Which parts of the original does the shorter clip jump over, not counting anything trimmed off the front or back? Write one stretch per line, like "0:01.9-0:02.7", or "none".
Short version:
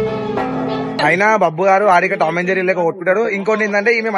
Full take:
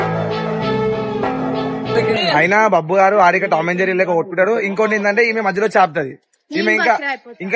0:01.8-0:02.3